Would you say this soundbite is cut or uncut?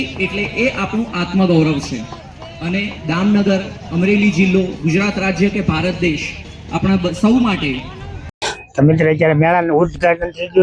uncut